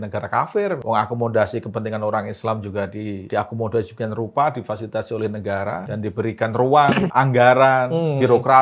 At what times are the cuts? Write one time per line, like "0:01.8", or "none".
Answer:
0:00.8
0:03.3
0:05.8
0:07.1